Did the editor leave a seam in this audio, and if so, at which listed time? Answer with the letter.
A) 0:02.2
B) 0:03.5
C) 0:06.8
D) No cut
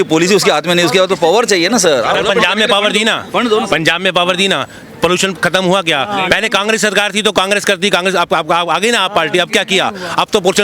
A